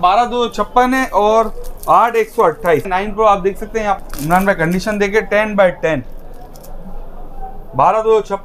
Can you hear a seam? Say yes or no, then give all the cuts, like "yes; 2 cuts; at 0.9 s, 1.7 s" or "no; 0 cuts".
yes; 2 cuts; at 2.9 s, 4.0 s